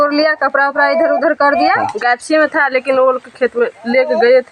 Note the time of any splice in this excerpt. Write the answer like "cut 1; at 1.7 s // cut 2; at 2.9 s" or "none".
cut 1; at 1.8 s